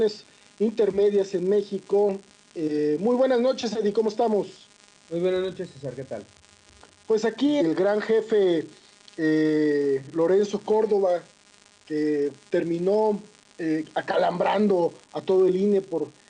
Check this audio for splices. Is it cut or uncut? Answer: uncut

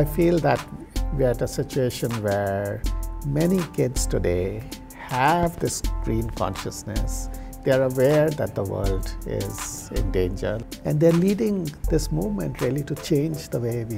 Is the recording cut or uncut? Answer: cut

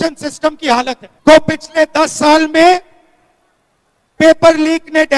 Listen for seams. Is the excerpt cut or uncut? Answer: cut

